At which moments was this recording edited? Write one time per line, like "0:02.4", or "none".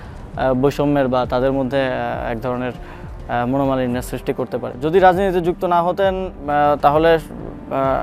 0:04.7